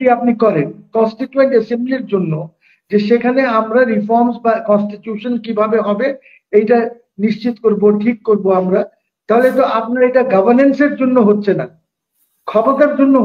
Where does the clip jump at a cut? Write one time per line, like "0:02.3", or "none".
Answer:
none